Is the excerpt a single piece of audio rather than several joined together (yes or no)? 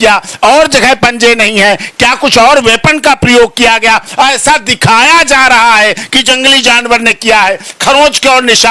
yes